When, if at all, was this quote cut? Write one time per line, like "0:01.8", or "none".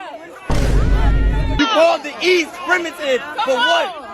0:01.6